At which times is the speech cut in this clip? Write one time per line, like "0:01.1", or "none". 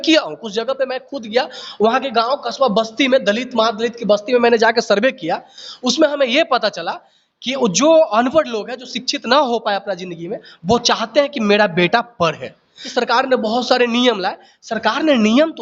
0:12.9